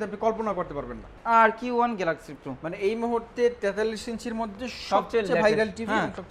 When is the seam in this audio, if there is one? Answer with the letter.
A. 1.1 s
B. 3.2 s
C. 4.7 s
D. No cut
A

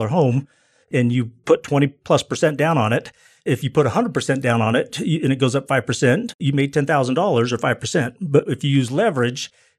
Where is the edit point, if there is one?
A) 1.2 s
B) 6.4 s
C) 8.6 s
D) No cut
B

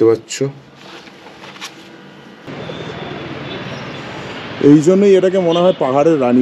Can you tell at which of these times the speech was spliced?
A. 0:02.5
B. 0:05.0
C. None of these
A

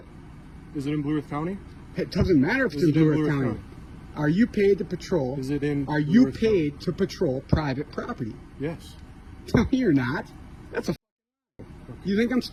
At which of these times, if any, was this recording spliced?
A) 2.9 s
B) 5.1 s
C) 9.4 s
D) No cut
D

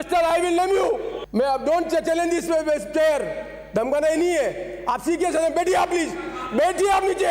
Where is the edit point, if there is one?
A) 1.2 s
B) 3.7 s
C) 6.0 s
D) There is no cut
A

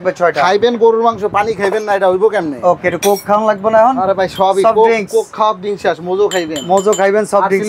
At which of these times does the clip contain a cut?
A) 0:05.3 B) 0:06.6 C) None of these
C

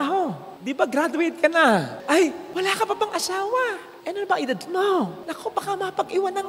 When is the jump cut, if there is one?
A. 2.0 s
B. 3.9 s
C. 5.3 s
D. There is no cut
A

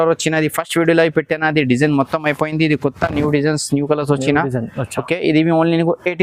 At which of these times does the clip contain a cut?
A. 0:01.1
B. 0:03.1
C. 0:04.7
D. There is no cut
D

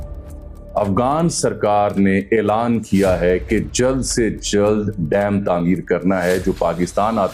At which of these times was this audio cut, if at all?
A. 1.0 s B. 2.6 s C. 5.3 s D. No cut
D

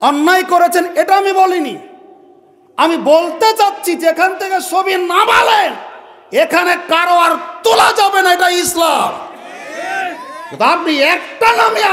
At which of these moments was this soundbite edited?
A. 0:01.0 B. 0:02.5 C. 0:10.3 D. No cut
D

